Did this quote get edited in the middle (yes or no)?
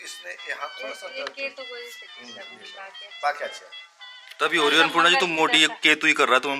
no